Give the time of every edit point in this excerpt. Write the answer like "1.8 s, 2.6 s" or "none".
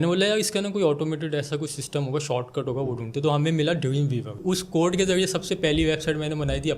4.4 s